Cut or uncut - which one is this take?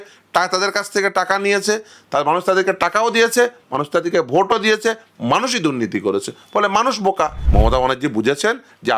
cut